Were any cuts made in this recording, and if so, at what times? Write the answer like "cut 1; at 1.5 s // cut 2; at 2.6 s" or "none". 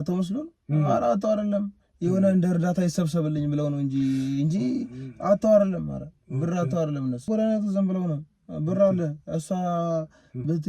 cut 1; at 7.3 s